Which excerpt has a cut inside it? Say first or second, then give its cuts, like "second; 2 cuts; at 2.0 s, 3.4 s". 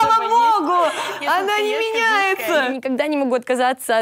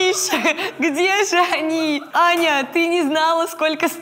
second; 1 cut; at 2.0 s